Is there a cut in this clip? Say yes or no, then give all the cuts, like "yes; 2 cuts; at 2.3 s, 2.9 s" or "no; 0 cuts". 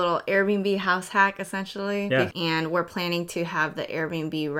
yes; 1 cut; at 2.3 s